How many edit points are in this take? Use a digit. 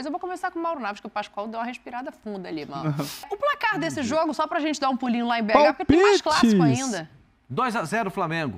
1